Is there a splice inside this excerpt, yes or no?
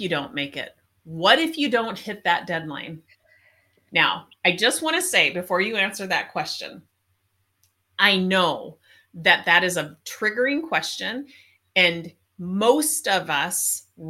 no